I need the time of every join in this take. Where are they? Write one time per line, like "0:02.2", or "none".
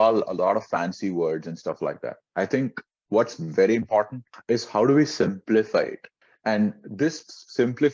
none